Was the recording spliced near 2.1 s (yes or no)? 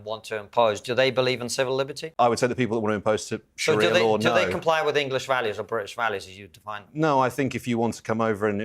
yes